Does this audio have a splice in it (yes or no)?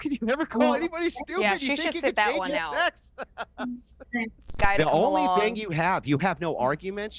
yes